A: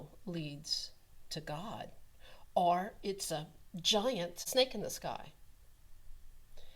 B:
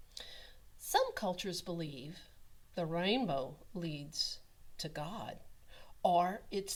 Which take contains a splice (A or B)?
A